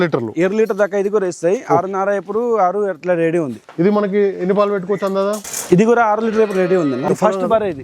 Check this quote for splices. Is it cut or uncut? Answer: cut